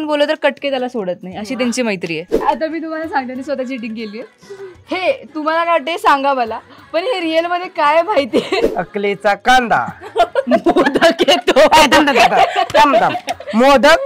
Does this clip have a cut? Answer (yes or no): yes